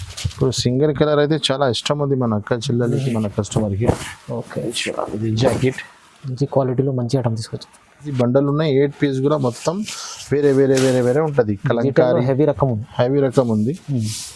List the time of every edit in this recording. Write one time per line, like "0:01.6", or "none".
0:08.1